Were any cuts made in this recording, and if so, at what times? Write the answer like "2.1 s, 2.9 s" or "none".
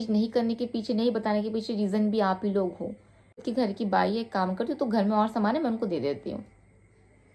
none